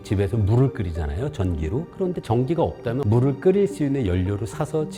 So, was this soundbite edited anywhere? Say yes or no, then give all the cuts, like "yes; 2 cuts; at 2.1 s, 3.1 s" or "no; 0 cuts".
no; 0 cuts